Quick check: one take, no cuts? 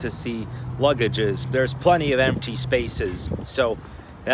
yes; 0 cuts

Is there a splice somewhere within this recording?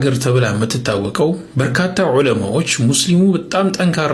no; 0 cuts

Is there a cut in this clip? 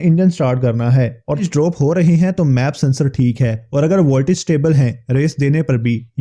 yes; 1 cut; at 1.5 s

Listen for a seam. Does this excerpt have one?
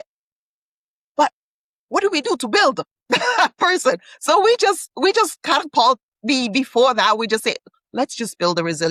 no; 0 cuts

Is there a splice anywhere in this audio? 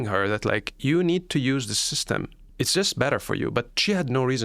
yes; 1 cut; at 2.5 s

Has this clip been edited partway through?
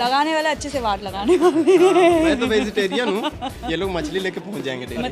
no; 0 cuts

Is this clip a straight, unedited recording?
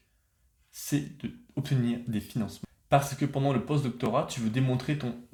yes; 0 cuts

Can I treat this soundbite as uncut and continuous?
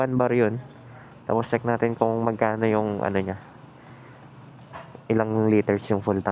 yes; 0 cuts

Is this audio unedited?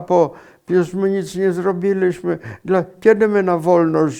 yes; 0 cuts

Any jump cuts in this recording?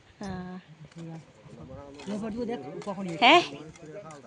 no; 0 cuts

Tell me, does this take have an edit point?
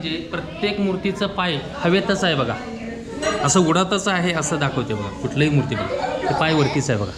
no; 0 cuts

